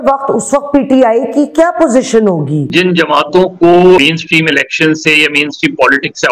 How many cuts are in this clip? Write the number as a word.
two